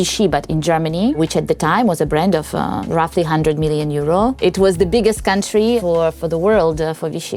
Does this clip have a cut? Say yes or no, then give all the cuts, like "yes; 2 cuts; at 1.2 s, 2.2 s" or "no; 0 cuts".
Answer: no; 0 cuts